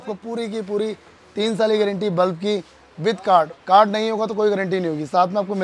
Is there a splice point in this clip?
no; 0 cuts

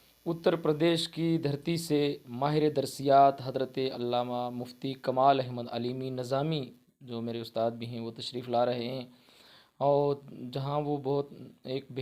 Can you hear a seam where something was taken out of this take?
no; 0 cuts

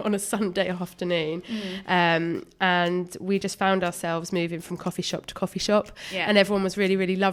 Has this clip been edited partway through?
no; 0 cuts

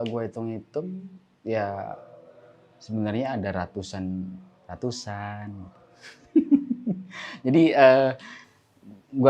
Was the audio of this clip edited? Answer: no; 0 cuts

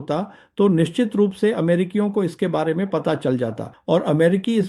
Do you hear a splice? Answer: yes; 1 cut; at 3.7 s

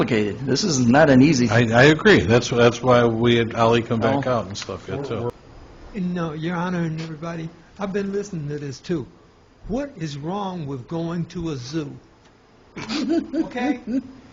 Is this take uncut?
no; 1 cut; at 5.3 s

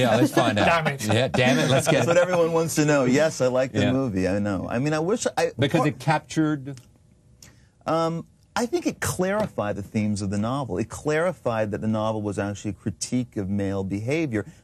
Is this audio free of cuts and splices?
no; 1 cut; at 9.2 s

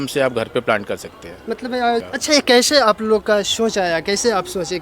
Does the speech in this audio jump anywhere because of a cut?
yes; 1 cut; at 1.7 s

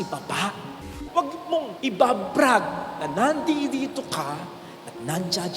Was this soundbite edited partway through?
yes; 1 cut; at 1.0 s

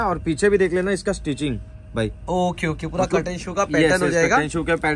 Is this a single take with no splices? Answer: yes; 0 cuts

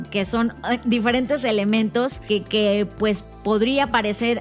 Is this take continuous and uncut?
no; 1 cut; at 2.2 s

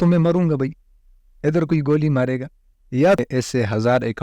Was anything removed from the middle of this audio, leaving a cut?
yes; 1 cut; at 3.2 s

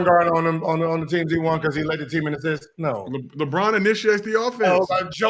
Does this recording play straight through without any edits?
yes; 0 cuts

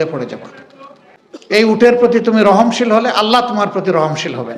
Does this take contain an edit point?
yes; 1 cut; at 1.5 s

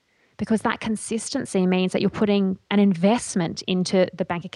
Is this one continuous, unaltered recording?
no; 1 cut; at 2.6 s

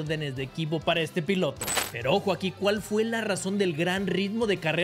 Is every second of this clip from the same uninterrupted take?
no; 1 cut; at 1.8 s

